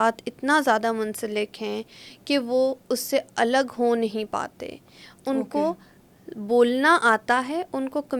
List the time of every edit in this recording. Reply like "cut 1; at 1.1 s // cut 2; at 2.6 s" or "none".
none